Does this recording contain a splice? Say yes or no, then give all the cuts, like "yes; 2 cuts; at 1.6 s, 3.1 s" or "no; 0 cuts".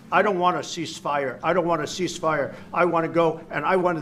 no; 0 cuts